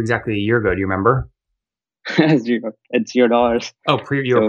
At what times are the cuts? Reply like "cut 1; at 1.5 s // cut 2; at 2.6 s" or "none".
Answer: none